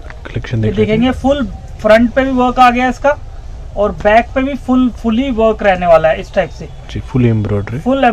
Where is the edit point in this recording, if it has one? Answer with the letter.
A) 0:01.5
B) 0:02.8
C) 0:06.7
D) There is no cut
D